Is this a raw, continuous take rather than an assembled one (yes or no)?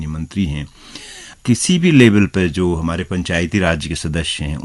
no